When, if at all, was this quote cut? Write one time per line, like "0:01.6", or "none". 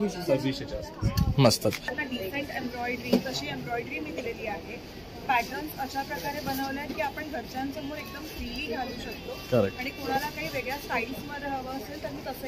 0:01.9